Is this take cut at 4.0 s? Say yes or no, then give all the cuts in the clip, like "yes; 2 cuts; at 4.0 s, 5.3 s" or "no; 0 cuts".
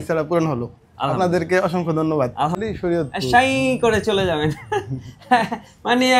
no; 1 cut; at 2.6 s